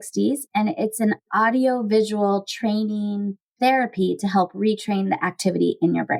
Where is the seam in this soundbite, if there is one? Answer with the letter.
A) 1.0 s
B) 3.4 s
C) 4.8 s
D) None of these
B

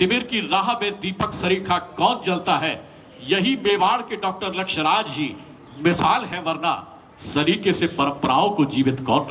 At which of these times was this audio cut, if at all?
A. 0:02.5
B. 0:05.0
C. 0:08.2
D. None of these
D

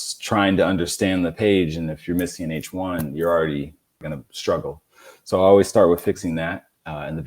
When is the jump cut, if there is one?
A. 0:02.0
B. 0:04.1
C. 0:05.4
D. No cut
B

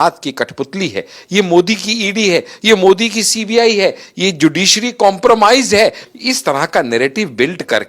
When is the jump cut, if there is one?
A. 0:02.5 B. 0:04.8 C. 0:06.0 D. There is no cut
C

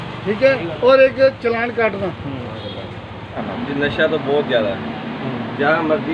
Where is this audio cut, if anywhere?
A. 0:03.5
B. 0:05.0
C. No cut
A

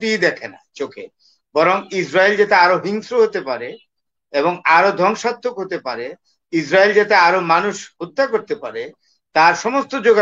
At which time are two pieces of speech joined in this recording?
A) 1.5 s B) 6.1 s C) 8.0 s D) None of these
D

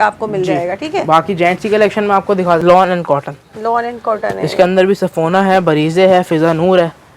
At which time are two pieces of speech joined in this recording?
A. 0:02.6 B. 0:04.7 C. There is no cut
A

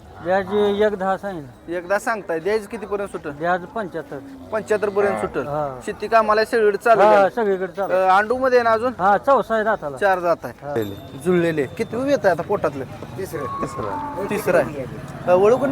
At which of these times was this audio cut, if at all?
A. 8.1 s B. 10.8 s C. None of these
B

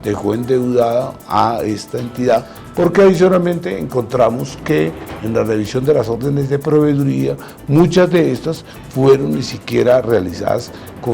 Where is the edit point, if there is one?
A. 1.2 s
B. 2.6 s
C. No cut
B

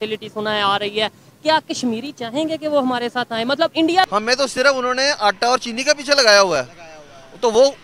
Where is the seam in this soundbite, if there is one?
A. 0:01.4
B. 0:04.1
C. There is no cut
B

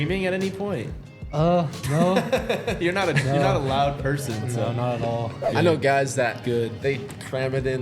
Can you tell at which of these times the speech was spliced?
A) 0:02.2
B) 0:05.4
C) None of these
B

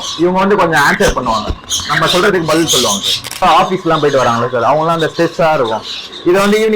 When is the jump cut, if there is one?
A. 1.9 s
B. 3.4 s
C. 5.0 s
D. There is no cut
B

